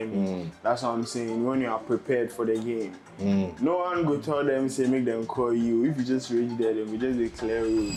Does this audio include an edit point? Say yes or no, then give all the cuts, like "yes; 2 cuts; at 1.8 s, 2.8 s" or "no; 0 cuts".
no; 0 cuts